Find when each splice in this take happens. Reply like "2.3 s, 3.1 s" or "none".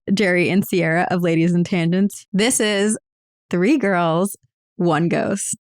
2.2 s